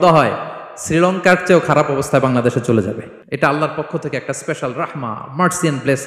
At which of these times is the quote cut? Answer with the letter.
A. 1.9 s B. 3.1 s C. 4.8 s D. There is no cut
B